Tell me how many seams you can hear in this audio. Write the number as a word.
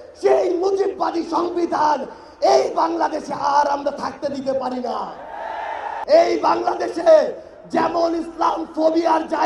one